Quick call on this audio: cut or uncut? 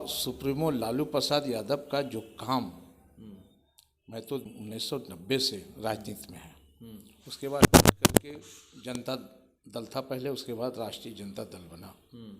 cut